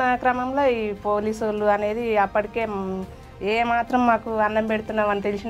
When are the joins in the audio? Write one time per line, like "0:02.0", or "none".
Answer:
none